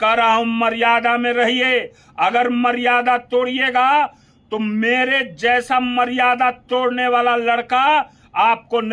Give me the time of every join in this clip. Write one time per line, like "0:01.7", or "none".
none